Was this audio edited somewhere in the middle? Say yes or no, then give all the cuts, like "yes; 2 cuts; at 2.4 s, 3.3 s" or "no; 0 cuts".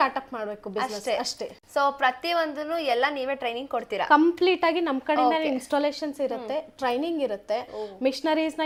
no; 0 cuts